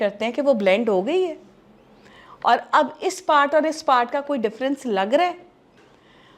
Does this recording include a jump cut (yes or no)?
no